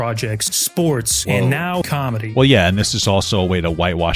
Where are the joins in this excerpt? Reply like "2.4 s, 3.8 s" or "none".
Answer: 0.9 s, 2.0 s